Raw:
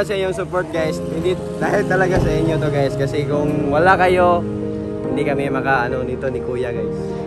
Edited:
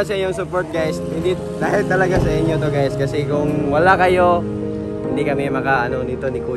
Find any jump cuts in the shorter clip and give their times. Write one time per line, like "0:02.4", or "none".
none